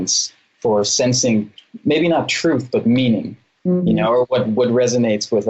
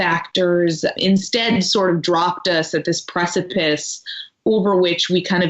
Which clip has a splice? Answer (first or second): second